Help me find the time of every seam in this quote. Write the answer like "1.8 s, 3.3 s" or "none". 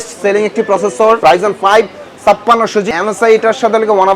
1.2 s, 2.9 s